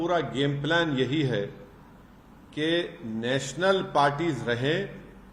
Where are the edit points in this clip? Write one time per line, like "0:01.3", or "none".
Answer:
none